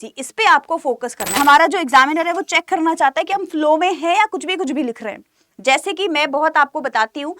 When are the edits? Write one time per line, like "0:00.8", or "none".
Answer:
0:01.3